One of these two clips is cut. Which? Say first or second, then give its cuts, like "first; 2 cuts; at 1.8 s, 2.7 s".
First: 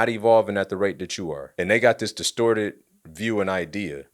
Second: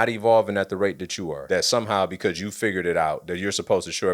second; 1 cut; at 1.4 s